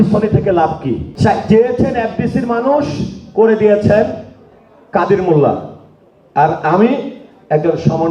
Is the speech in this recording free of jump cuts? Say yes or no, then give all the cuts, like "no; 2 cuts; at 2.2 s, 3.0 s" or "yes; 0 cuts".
no; 1 cut; at 1.1 s